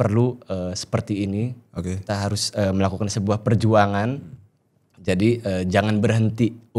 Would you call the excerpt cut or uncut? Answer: uncut